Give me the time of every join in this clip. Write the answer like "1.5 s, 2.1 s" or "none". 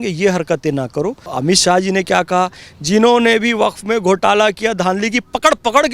1.3 s